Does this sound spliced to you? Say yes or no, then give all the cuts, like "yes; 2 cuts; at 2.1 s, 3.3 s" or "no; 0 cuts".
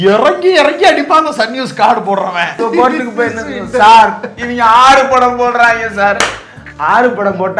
yes; 1 cut; at 2.6 s